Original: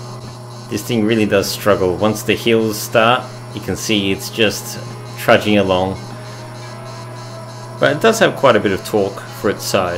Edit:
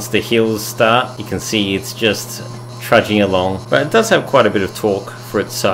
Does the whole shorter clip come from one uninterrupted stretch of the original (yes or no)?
no